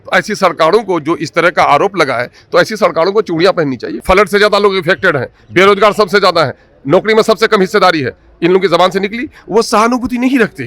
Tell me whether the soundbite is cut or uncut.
cut